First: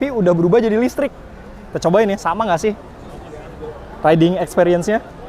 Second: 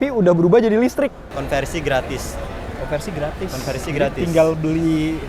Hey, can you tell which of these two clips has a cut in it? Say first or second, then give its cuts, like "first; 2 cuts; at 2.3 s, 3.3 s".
second; 1 cut; at 1.3 s